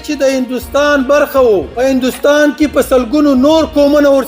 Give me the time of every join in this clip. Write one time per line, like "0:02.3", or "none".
0:01.7